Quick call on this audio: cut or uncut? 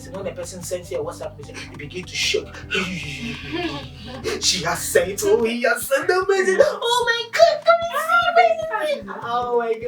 uncut